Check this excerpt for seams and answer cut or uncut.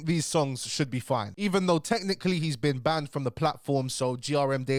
uncut